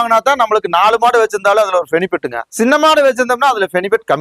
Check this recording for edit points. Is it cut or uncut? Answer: cut